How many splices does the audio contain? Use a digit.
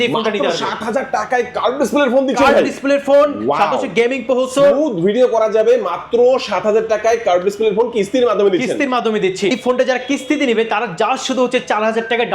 1